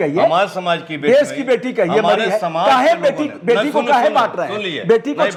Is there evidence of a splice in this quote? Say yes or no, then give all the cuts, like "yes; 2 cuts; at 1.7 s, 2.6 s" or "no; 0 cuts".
no; 0 cuts